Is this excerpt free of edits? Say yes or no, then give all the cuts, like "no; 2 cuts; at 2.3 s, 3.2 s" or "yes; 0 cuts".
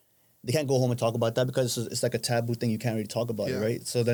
yes; 0 cuts